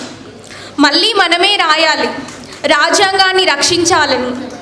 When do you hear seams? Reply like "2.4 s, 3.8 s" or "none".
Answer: none